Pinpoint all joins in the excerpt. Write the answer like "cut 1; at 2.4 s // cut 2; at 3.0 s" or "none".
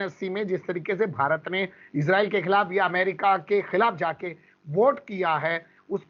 none